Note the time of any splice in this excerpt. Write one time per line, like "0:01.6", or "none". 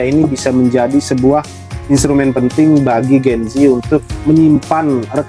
none